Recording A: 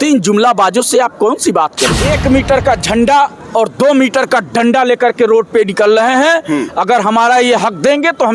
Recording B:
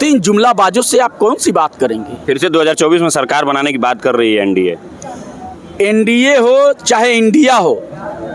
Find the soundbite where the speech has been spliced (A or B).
A